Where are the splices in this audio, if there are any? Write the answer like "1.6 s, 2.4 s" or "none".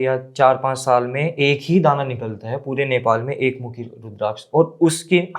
none